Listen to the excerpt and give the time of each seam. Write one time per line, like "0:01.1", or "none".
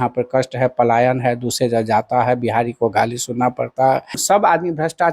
0:04.2